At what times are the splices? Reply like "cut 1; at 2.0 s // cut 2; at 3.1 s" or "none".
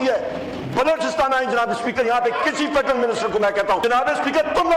cut 1; at 3.8 s